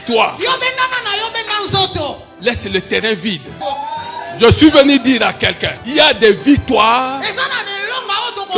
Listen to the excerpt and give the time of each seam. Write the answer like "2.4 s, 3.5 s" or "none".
2.3 s, 3.6 s, 5.7 s